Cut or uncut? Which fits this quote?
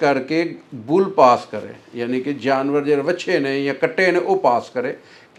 uncut